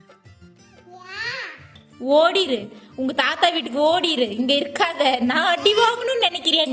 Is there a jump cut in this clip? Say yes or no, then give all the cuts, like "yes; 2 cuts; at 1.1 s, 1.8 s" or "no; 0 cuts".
no; 0 cuts